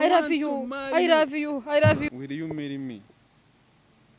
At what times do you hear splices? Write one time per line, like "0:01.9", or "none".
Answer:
0:02.1